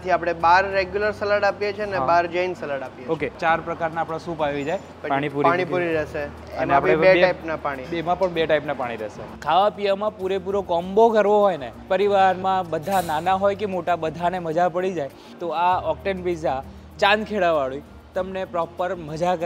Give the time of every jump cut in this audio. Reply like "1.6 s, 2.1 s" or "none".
3.4 s, 4.9 s, 6.3 s, 9.3 s, 15.3 s